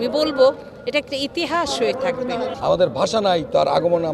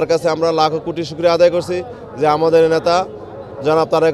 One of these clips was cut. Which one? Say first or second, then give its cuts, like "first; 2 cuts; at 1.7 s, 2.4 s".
first; 1 cut; at 2.5 s